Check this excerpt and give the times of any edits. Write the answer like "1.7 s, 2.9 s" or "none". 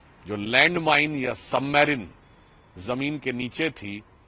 none